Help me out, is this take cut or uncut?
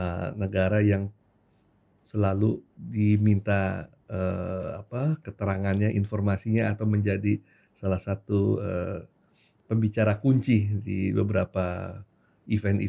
uncut